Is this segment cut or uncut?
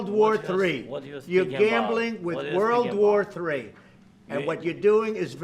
uncut